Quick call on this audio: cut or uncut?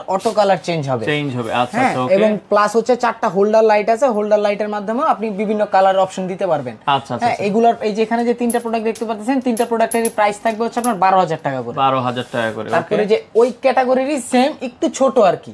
uncut